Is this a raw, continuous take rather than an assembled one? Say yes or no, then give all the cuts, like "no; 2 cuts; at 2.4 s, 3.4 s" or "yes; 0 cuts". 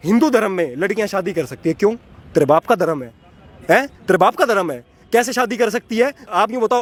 yes; 0 cuts